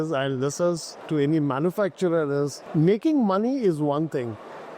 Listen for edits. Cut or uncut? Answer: cut